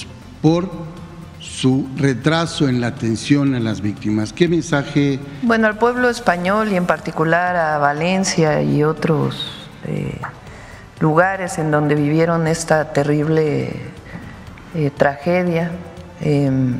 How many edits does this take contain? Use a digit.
1